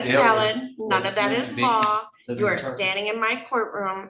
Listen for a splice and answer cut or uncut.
uncut